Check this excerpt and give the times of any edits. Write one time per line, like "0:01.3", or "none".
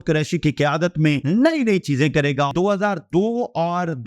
0:01.2
0:02.5